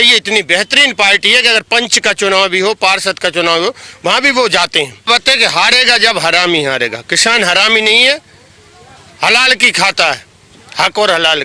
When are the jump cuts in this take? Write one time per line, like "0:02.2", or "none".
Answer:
0:05.1